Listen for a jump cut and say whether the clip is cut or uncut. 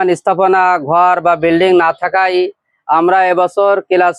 uncut